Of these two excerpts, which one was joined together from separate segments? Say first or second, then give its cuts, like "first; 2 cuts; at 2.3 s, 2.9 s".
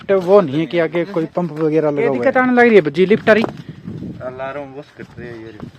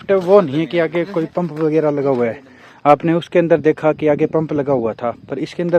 first; 1 cut; at 2.2 s